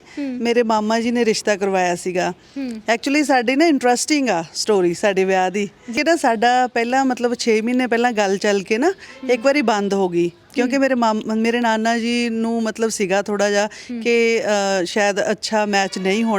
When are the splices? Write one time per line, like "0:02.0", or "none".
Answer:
0:05.9